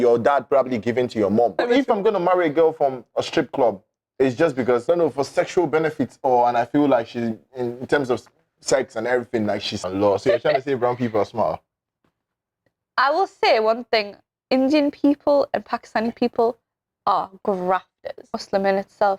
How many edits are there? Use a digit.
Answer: 4